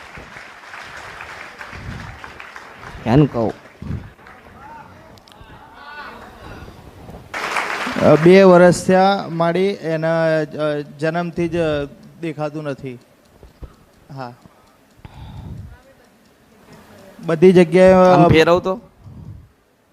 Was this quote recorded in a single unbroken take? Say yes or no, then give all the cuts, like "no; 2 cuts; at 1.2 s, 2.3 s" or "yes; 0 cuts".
no; 1 cut; at 7.3 s